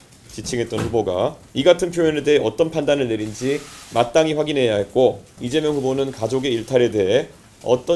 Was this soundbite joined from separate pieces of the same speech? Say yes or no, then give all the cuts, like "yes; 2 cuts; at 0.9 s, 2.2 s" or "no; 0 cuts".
yes; 2 cuts; at 1.4 s, 5.3 s